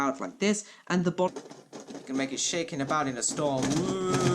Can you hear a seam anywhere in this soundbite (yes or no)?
yes